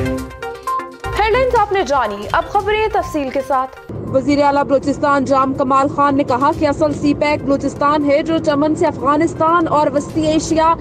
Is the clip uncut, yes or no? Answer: yes